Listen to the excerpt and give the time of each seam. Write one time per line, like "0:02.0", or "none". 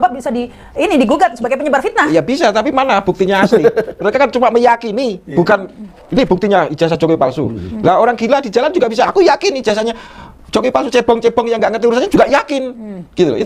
none